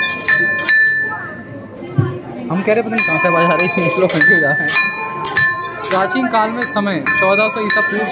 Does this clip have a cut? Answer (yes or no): no